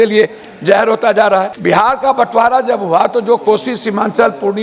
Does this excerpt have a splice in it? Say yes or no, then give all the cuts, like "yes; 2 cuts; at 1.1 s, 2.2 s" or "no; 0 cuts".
yes; 1 cut; at 1.5 s